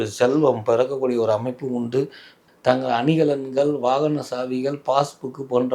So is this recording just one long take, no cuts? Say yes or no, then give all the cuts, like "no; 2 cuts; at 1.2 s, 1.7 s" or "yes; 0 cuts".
no; 1 cut; at 2.3 s